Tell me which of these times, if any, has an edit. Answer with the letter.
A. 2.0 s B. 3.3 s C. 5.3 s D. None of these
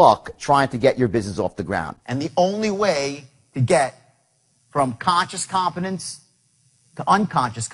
A